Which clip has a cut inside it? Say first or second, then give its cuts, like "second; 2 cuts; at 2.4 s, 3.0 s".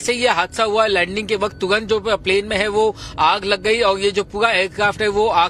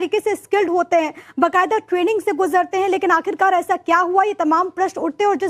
first; 1 cut; at 1.6 s